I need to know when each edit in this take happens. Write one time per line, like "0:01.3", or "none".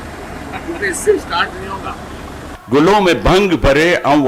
0:02.5